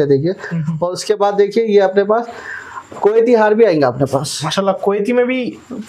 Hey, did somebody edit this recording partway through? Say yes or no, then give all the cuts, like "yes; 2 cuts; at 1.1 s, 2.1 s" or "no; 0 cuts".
no; 0 cuts